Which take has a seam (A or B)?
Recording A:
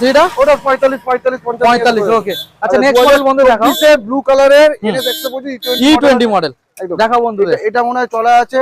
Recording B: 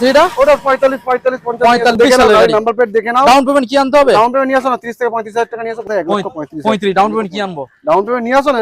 B